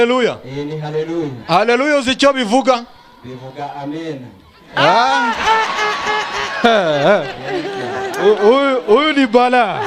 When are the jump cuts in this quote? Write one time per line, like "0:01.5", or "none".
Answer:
none